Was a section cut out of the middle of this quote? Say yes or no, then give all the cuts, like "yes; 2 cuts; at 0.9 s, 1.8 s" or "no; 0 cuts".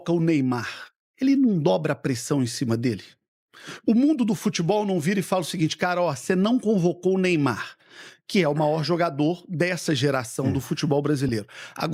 no; 0 cuts